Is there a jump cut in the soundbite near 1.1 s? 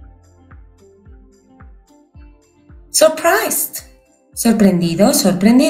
no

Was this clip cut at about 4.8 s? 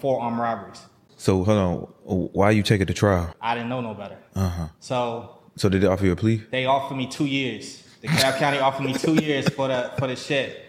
no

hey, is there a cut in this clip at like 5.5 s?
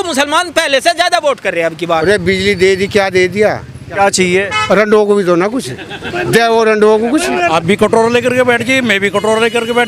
no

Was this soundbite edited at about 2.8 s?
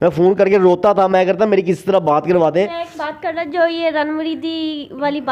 yes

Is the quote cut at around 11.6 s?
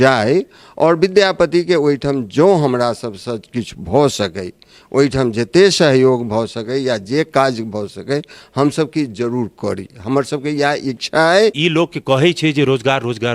yes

